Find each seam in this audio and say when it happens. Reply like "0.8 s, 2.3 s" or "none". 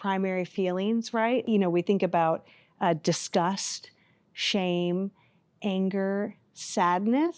1.5 s